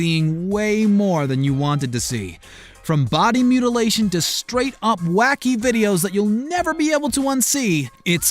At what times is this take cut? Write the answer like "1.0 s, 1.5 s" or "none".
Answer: 5.3 s